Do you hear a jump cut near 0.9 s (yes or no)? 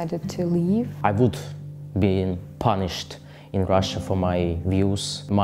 yes